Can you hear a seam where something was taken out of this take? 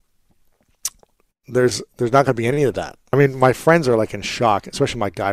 yes; 1 cut; at 3.1 s

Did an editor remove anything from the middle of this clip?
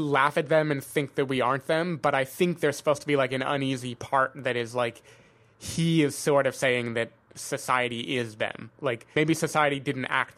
yes; 1 cut; at 9.1 s

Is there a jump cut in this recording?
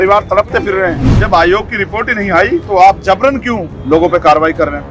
yes; 3 cuts; at 1.2 s, 2.6 s, 3.7 s

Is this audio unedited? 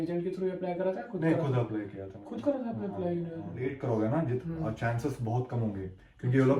no; 1 cut; at 3.8 s

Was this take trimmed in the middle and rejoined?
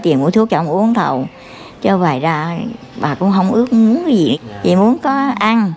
yes; 1 cut; at 4.4 s

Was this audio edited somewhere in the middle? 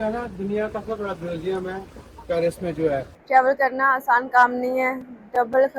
yes; 1 cut; at 3.1 s

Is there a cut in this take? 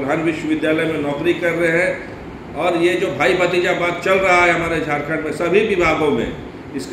no; 0 cuts

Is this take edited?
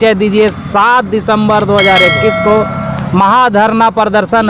no; 0 cuts

